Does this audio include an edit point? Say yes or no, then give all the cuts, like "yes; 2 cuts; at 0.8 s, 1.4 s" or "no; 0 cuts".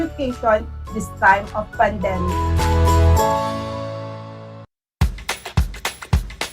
yes; 1 cut; at 4.9 s